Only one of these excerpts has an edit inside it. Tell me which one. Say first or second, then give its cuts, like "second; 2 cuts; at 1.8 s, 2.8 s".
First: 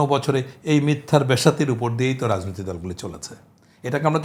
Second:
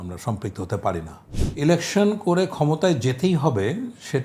second; 1 cut; at 1.4 s